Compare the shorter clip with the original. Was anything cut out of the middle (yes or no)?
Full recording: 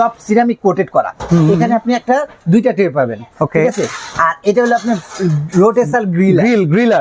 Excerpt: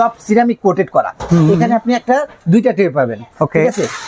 no